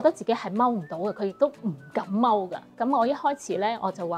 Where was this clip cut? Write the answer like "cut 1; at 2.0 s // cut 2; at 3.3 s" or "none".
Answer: cut 1; at 2.7 s